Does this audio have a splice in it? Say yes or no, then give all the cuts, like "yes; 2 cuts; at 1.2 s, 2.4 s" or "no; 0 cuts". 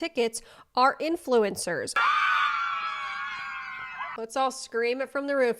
yes; 2 cuts; at 2.0 s, 4.1 s